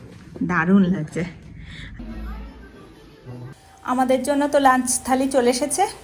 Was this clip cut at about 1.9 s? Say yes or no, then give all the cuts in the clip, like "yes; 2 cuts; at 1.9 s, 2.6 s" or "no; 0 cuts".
yes; 1 cut; at 1.9 s